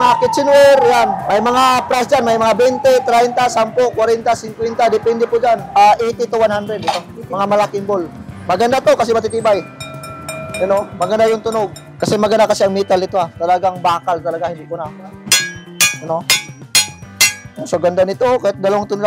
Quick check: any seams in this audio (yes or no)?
yes